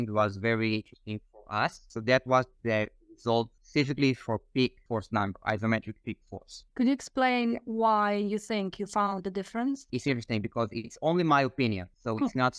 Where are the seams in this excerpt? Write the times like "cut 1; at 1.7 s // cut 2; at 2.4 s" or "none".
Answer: cut 1; at 1.9 s // cut 2; at 9.9 s